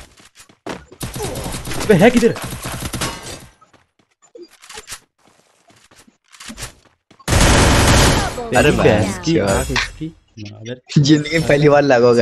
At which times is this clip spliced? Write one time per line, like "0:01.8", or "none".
none